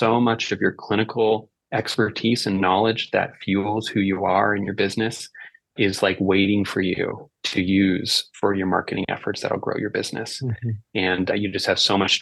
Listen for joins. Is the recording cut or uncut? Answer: uncut